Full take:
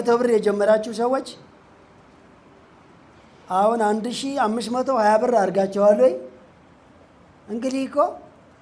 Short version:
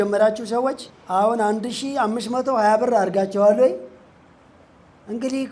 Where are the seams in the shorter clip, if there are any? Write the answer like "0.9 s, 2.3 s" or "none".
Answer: 0.9 s